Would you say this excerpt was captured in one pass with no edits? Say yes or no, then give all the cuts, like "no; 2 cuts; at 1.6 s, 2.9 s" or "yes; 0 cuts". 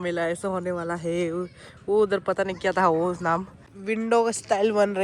no; 1 cut; at 3.7 s